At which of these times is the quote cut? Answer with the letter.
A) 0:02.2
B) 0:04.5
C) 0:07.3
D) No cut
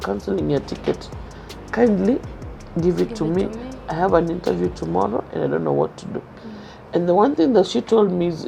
D